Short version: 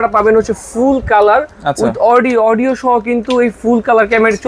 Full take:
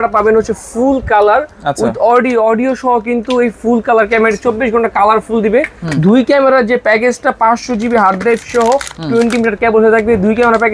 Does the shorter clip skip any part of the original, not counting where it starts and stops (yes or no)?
no